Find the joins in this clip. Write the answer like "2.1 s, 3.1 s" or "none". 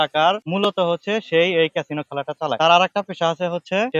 none